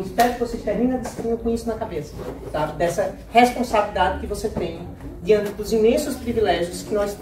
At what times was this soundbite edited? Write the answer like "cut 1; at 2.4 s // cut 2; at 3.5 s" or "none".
none